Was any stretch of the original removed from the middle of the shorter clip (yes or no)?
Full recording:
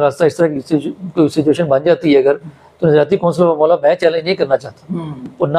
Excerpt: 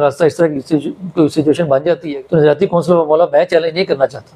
yes